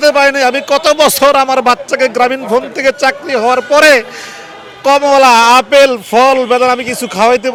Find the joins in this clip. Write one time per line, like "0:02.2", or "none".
none